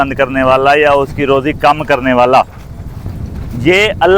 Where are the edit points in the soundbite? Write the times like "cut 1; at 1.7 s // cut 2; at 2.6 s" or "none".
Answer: none